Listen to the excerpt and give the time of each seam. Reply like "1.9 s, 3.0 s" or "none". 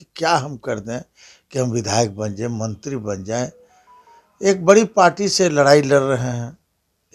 none